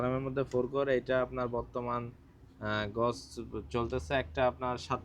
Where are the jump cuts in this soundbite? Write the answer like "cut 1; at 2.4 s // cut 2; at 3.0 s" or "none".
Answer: none